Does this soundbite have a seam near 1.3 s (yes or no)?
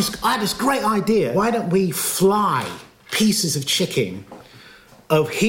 yes